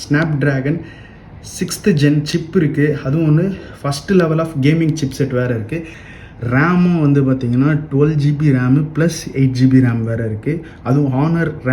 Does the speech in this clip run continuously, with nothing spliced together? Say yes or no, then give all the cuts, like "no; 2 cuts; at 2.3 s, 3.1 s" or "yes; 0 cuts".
no; 1 cut; at 6.0 s